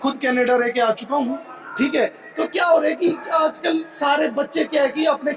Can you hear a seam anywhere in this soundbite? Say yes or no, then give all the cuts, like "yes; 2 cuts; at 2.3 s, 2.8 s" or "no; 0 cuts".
no; 0 cuts